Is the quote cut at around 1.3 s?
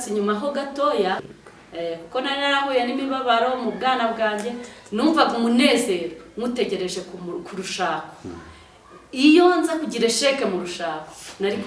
yes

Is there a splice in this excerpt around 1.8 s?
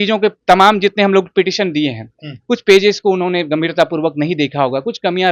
no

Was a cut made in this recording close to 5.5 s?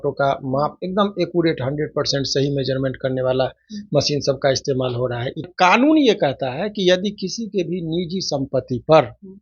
yes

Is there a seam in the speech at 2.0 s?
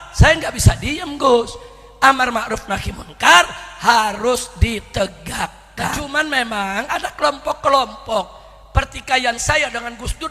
no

